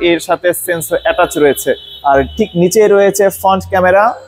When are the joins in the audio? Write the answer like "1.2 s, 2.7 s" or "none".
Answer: none